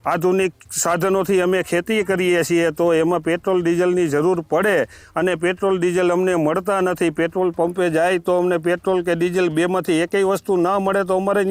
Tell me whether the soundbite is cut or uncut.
uncut